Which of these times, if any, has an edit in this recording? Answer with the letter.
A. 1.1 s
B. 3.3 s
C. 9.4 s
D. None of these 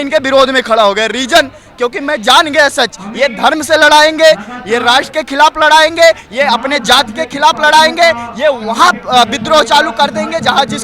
D